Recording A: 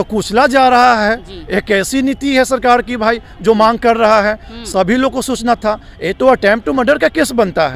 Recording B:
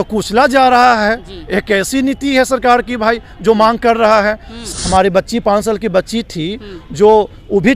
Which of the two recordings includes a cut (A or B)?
B